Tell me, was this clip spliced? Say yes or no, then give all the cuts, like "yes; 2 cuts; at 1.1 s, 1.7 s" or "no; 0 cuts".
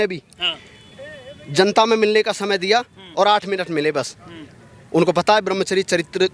no; 0 cuts